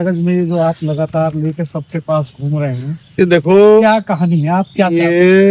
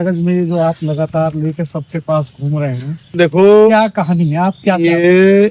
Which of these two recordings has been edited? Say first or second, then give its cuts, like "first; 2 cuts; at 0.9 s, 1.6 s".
second; 1 cut; at 3.2 s